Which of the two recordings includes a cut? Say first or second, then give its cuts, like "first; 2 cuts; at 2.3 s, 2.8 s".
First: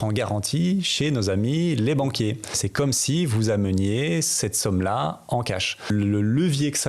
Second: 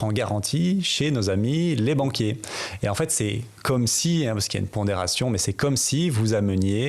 first; 2 cuts; at 2.6 s, 5.9 s